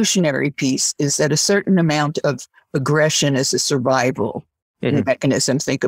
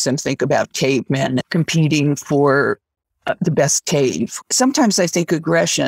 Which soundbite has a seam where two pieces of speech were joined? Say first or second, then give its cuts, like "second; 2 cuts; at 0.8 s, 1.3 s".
second; 2 cuts; at 1.4 s, 4.4 s